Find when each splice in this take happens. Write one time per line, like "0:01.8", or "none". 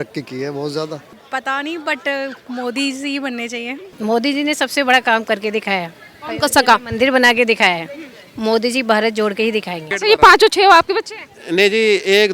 0:01.1
0:03.9
0:09.9